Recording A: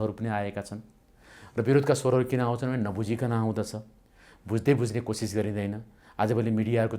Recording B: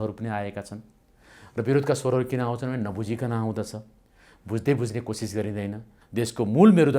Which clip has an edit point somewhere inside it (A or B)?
B